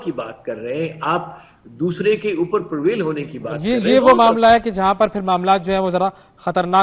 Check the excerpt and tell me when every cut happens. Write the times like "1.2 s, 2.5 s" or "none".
none